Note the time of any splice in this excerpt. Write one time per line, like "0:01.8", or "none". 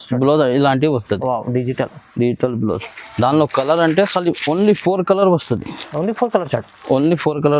none